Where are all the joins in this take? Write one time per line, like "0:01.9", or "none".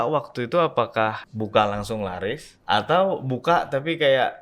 0:01.2
0:02.5